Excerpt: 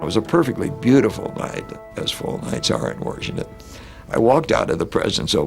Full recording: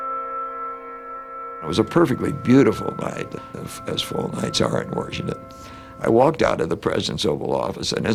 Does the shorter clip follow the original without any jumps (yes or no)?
no